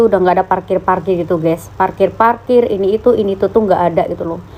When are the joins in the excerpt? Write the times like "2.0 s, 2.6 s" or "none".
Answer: none